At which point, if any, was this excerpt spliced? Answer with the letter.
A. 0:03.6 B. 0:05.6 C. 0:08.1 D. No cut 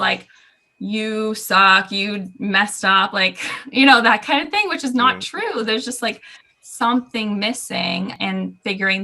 C